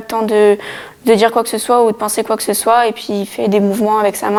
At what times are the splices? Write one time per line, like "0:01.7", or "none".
none

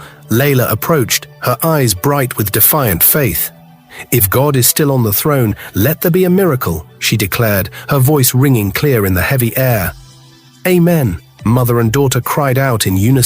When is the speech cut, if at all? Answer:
none

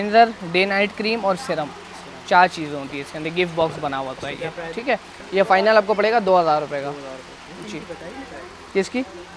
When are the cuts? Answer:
none

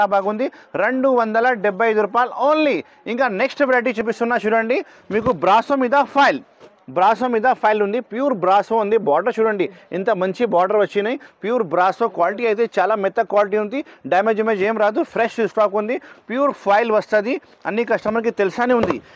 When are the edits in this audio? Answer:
none

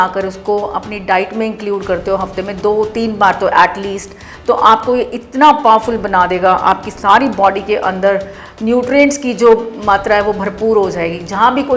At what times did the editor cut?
none

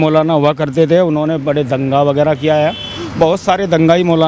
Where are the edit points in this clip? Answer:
none

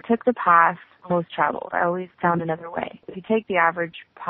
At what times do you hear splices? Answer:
0:00.9
0:02.1
0:03.1

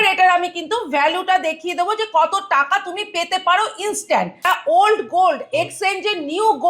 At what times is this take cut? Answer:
0:04.4

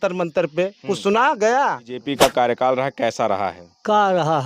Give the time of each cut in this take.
0:02.1

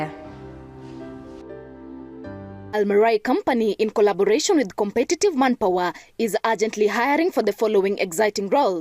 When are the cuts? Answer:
0:02.7

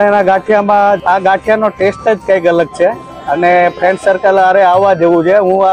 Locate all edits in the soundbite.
0:01.0

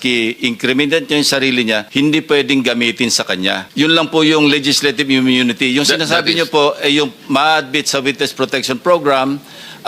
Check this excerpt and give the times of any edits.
0:01.9
0:03.6

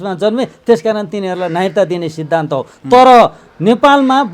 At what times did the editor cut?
none

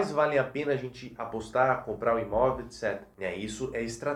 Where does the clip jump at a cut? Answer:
0:03.1

